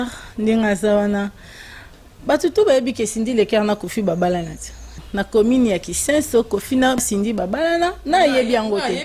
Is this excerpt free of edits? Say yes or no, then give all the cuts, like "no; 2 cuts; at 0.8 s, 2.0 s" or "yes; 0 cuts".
no; 2 cuts; at 5.0 s, 7.1 s